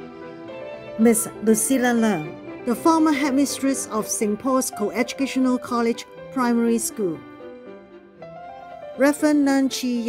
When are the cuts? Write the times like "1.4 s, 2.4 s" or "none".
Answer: none